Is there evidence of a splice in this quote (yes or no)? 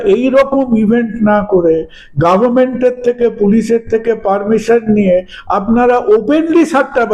no